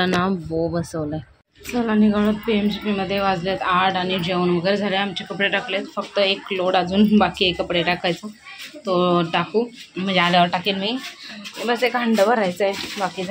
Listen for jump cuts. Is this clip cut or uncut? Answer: cut